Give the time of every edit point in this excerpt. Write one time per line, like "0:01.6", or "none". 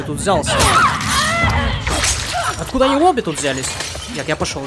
none